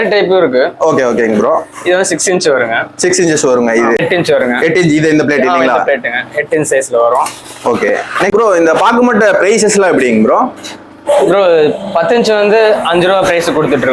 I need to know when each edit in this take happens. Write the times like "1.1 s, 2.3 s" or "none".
4.0 s, 8.3 s